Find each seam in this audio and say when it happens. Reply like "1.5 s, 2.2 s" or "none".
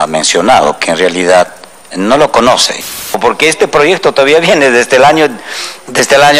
3.0 s

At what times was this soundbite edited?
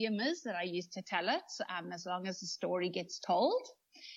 none

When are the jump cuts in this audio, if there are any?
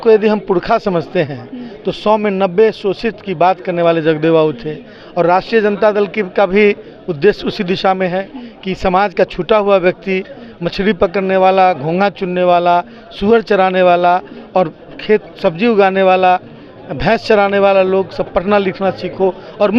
none

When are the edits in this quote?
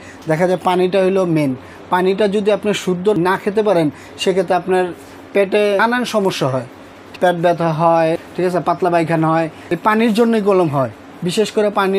3.2 s, 5.8 s, 7.0 s, 8.2 s, 9.6 s

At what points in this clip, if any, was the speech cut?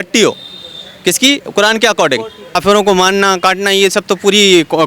2.6 s

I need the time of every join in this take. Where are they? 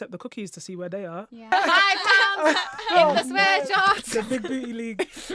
1.5 s

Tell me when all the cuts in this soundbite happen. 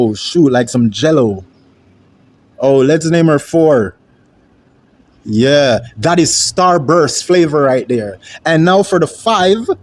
none

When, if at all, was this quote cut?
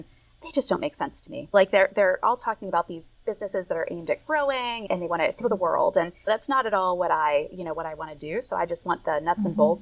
none

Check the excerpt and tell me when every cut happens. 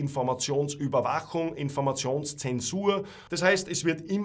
3.2 s

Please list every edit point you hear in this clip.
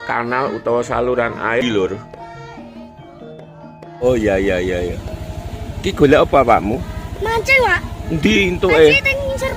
1.6 s

